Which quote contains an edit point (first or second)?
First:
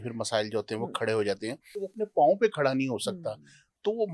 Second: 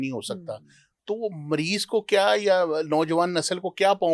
first